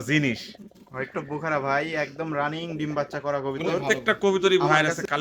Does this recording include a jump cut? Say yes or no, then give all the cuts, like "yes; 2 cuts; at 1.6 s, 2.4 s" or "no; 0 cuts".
yes; 1 cut; at 3.8 s